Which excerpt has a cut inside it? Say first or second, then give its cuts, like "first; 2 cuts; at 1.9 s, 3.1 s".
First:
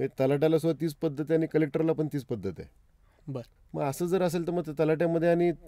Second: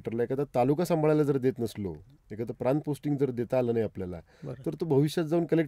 first; 1 cut; at 3.5 s